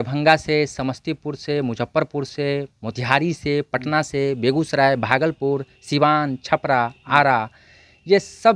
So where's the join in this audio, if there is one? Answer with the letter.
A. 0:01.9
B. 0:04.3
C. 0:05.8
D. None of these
D